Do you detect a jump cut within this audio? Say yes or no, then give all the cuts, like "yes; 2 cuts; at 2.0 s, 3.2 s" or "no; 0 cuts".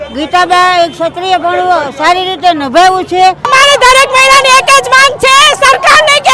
yes; 1 cut; at 3.5 s